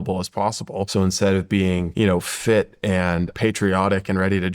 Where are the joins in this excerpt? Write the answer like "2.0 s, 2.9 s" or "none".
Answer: 0.9 s, 1.9 s, 3.3 s